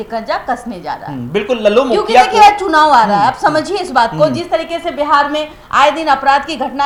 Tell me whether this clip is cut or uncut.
uncut